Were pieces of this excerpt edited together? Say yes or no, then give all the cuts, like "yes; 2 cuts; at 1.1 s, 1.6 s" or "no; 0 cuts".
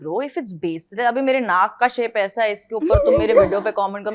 no; 0 cuts